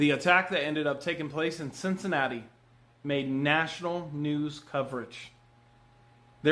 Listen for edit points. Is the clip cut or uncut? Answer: uncut